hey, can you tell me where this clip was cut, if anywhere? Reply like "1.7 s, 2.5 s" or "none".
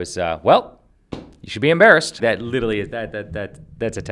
2.2 s